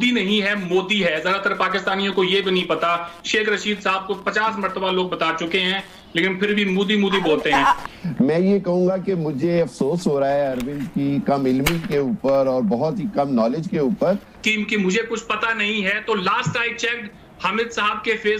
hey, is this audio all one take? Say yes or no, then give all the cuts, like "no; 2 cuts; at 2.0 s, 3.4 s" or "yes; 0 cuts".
no; 2 cuts; at 7.9 s, 14.3 s